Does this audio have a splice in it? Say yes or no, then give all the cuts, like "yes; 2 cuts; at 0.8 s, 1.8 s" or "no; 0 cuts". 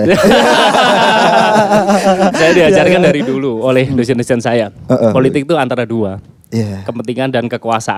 no; 0 cuts